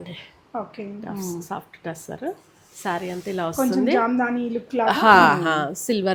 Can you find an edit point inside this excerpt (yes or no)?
no